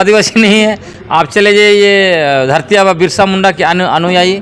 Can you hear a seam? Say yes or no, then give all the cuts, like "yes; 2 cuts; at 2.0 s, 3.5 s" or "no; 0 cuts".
no; 0 cuts